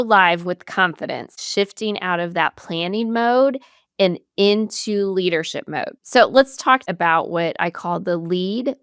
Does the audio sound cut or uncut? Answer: cut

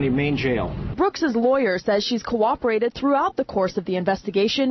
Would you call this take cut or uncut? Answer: cut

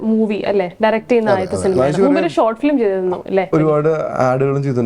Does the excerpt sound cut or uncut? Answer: cut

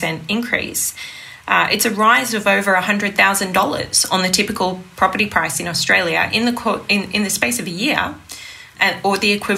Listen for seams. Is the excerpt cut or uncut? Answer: uncut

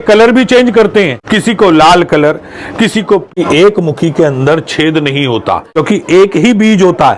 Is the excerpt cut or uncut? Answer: cut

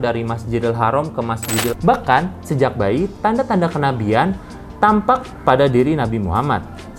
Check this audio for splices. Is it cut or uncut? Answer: cut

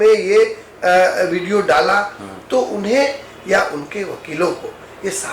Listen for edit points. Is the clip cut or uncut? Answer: uncut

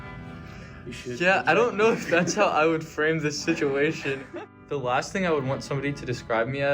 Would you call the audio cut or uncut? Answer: cut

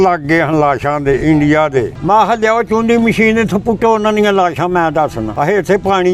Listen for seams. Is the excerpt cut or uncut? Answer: cut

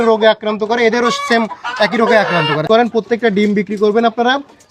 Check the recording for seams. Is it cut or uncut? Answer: cut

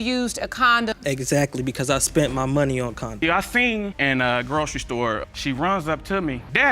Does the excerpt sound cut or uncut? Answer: cut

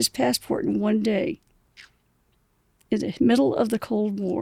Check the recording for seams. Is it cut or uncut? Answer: uncut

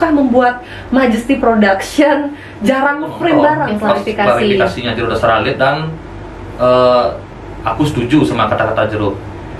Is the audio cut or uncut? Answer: cut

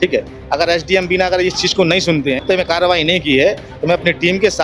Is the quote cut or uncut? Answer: cut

